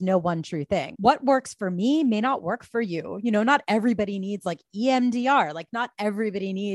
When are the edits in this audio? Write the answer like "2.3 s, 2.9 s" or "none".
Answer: 0.9 s